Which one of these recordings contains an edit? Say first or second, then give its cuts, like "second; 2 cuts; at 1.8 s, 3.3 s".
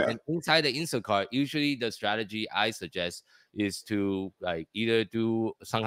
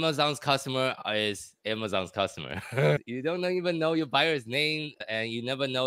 second; 1 cut; at 2.9 s